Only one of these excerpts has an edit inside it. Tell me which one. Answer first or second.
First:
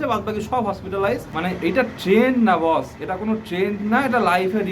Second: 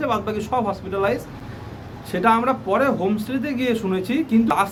first